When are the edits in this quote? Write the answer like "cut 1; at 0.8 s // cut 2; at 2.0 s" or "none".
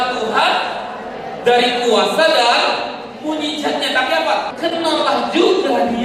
cut 1; at 4.5 s